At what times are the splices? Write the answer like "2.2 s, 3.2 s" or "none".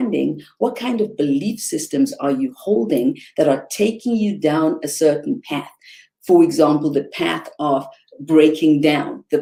none